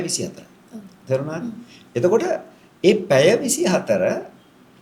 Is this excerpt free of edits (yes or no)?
yes